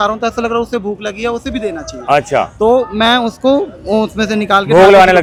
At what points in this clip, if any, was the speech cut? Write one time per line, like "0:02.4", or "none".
none

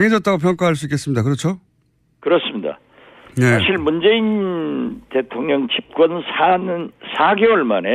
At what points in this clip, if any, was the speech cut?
0:06.6

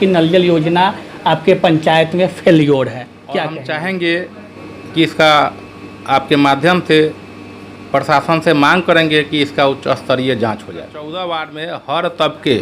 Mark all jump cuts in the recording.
0:03.5
0:11.0

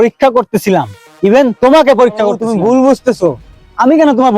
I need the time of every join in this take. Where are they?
0:02.4

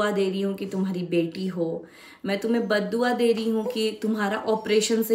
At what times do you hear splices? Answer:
none

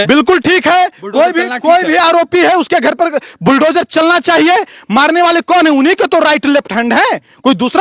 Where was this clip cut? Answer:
none

